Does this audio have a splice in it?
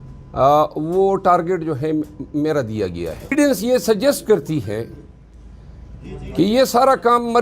yes; 1 cut; at 3.3 s

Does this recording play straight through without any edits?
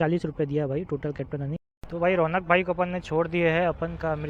no; 1 cut; at 1.8 s

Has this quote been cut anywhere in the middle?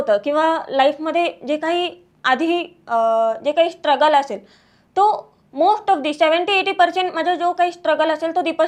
no; 0 cuts

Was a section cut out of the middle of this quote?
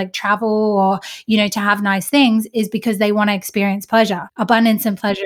yes; 1 cut; at 4.3 s

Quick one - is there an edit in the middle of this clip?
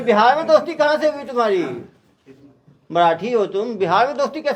no; 0 cuts

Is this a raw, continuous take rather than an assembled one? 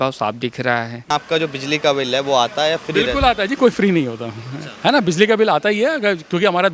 no; 1 cut; at 1.1 s

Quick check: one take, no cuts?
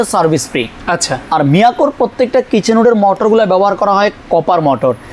yes; 0 cuts

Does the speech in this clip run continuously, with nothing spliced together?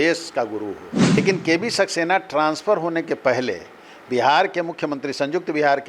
no; 1 cut; at 1.2 s

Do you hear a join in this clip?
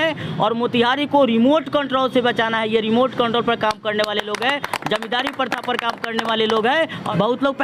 no; 0 cuts

